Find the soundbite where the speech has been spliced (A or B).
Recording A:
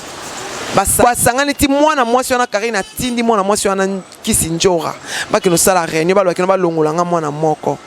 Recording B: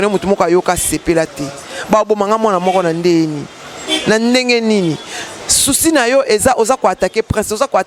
A